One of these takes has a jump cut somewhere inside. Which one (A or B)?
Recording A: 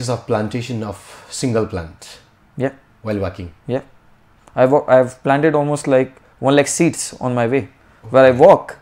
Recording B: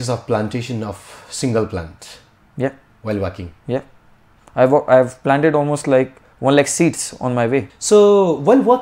B